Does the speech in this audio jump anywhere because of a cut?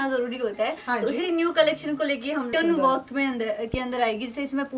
yes; 1 cut; at 2.5 s

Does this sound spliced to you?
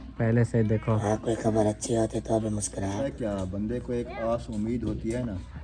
yes; 1 cut; at 3.0 s

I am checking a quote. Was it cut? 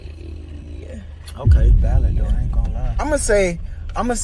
no; 0 cuts

